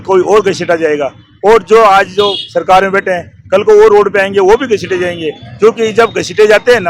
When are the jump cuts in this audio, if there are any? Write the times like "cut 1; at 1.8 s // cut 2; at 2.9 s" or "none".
none